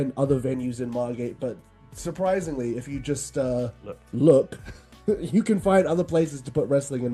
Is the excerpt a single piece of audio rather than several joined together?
yes; 0 cuts

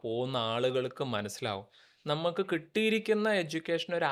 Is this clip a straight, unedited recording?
yes; 0 cuts

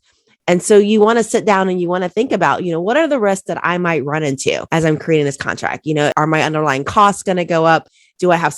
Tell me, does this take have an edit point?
yes; 2 cuts; at 4.6 s, 6.1 s

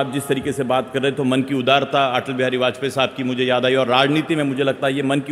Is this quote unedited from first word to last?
yes; 0 cuts

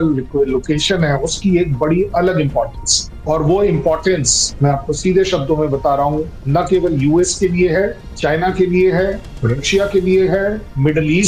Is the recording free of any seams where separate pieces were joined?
yes; 0 cuts

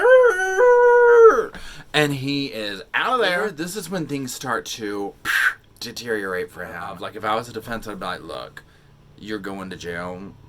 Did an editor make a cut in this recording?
yes; 2 cuts; at 3.5 s, 7.0 s

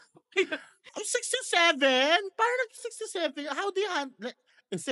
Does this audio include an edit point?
no; 0 cuts

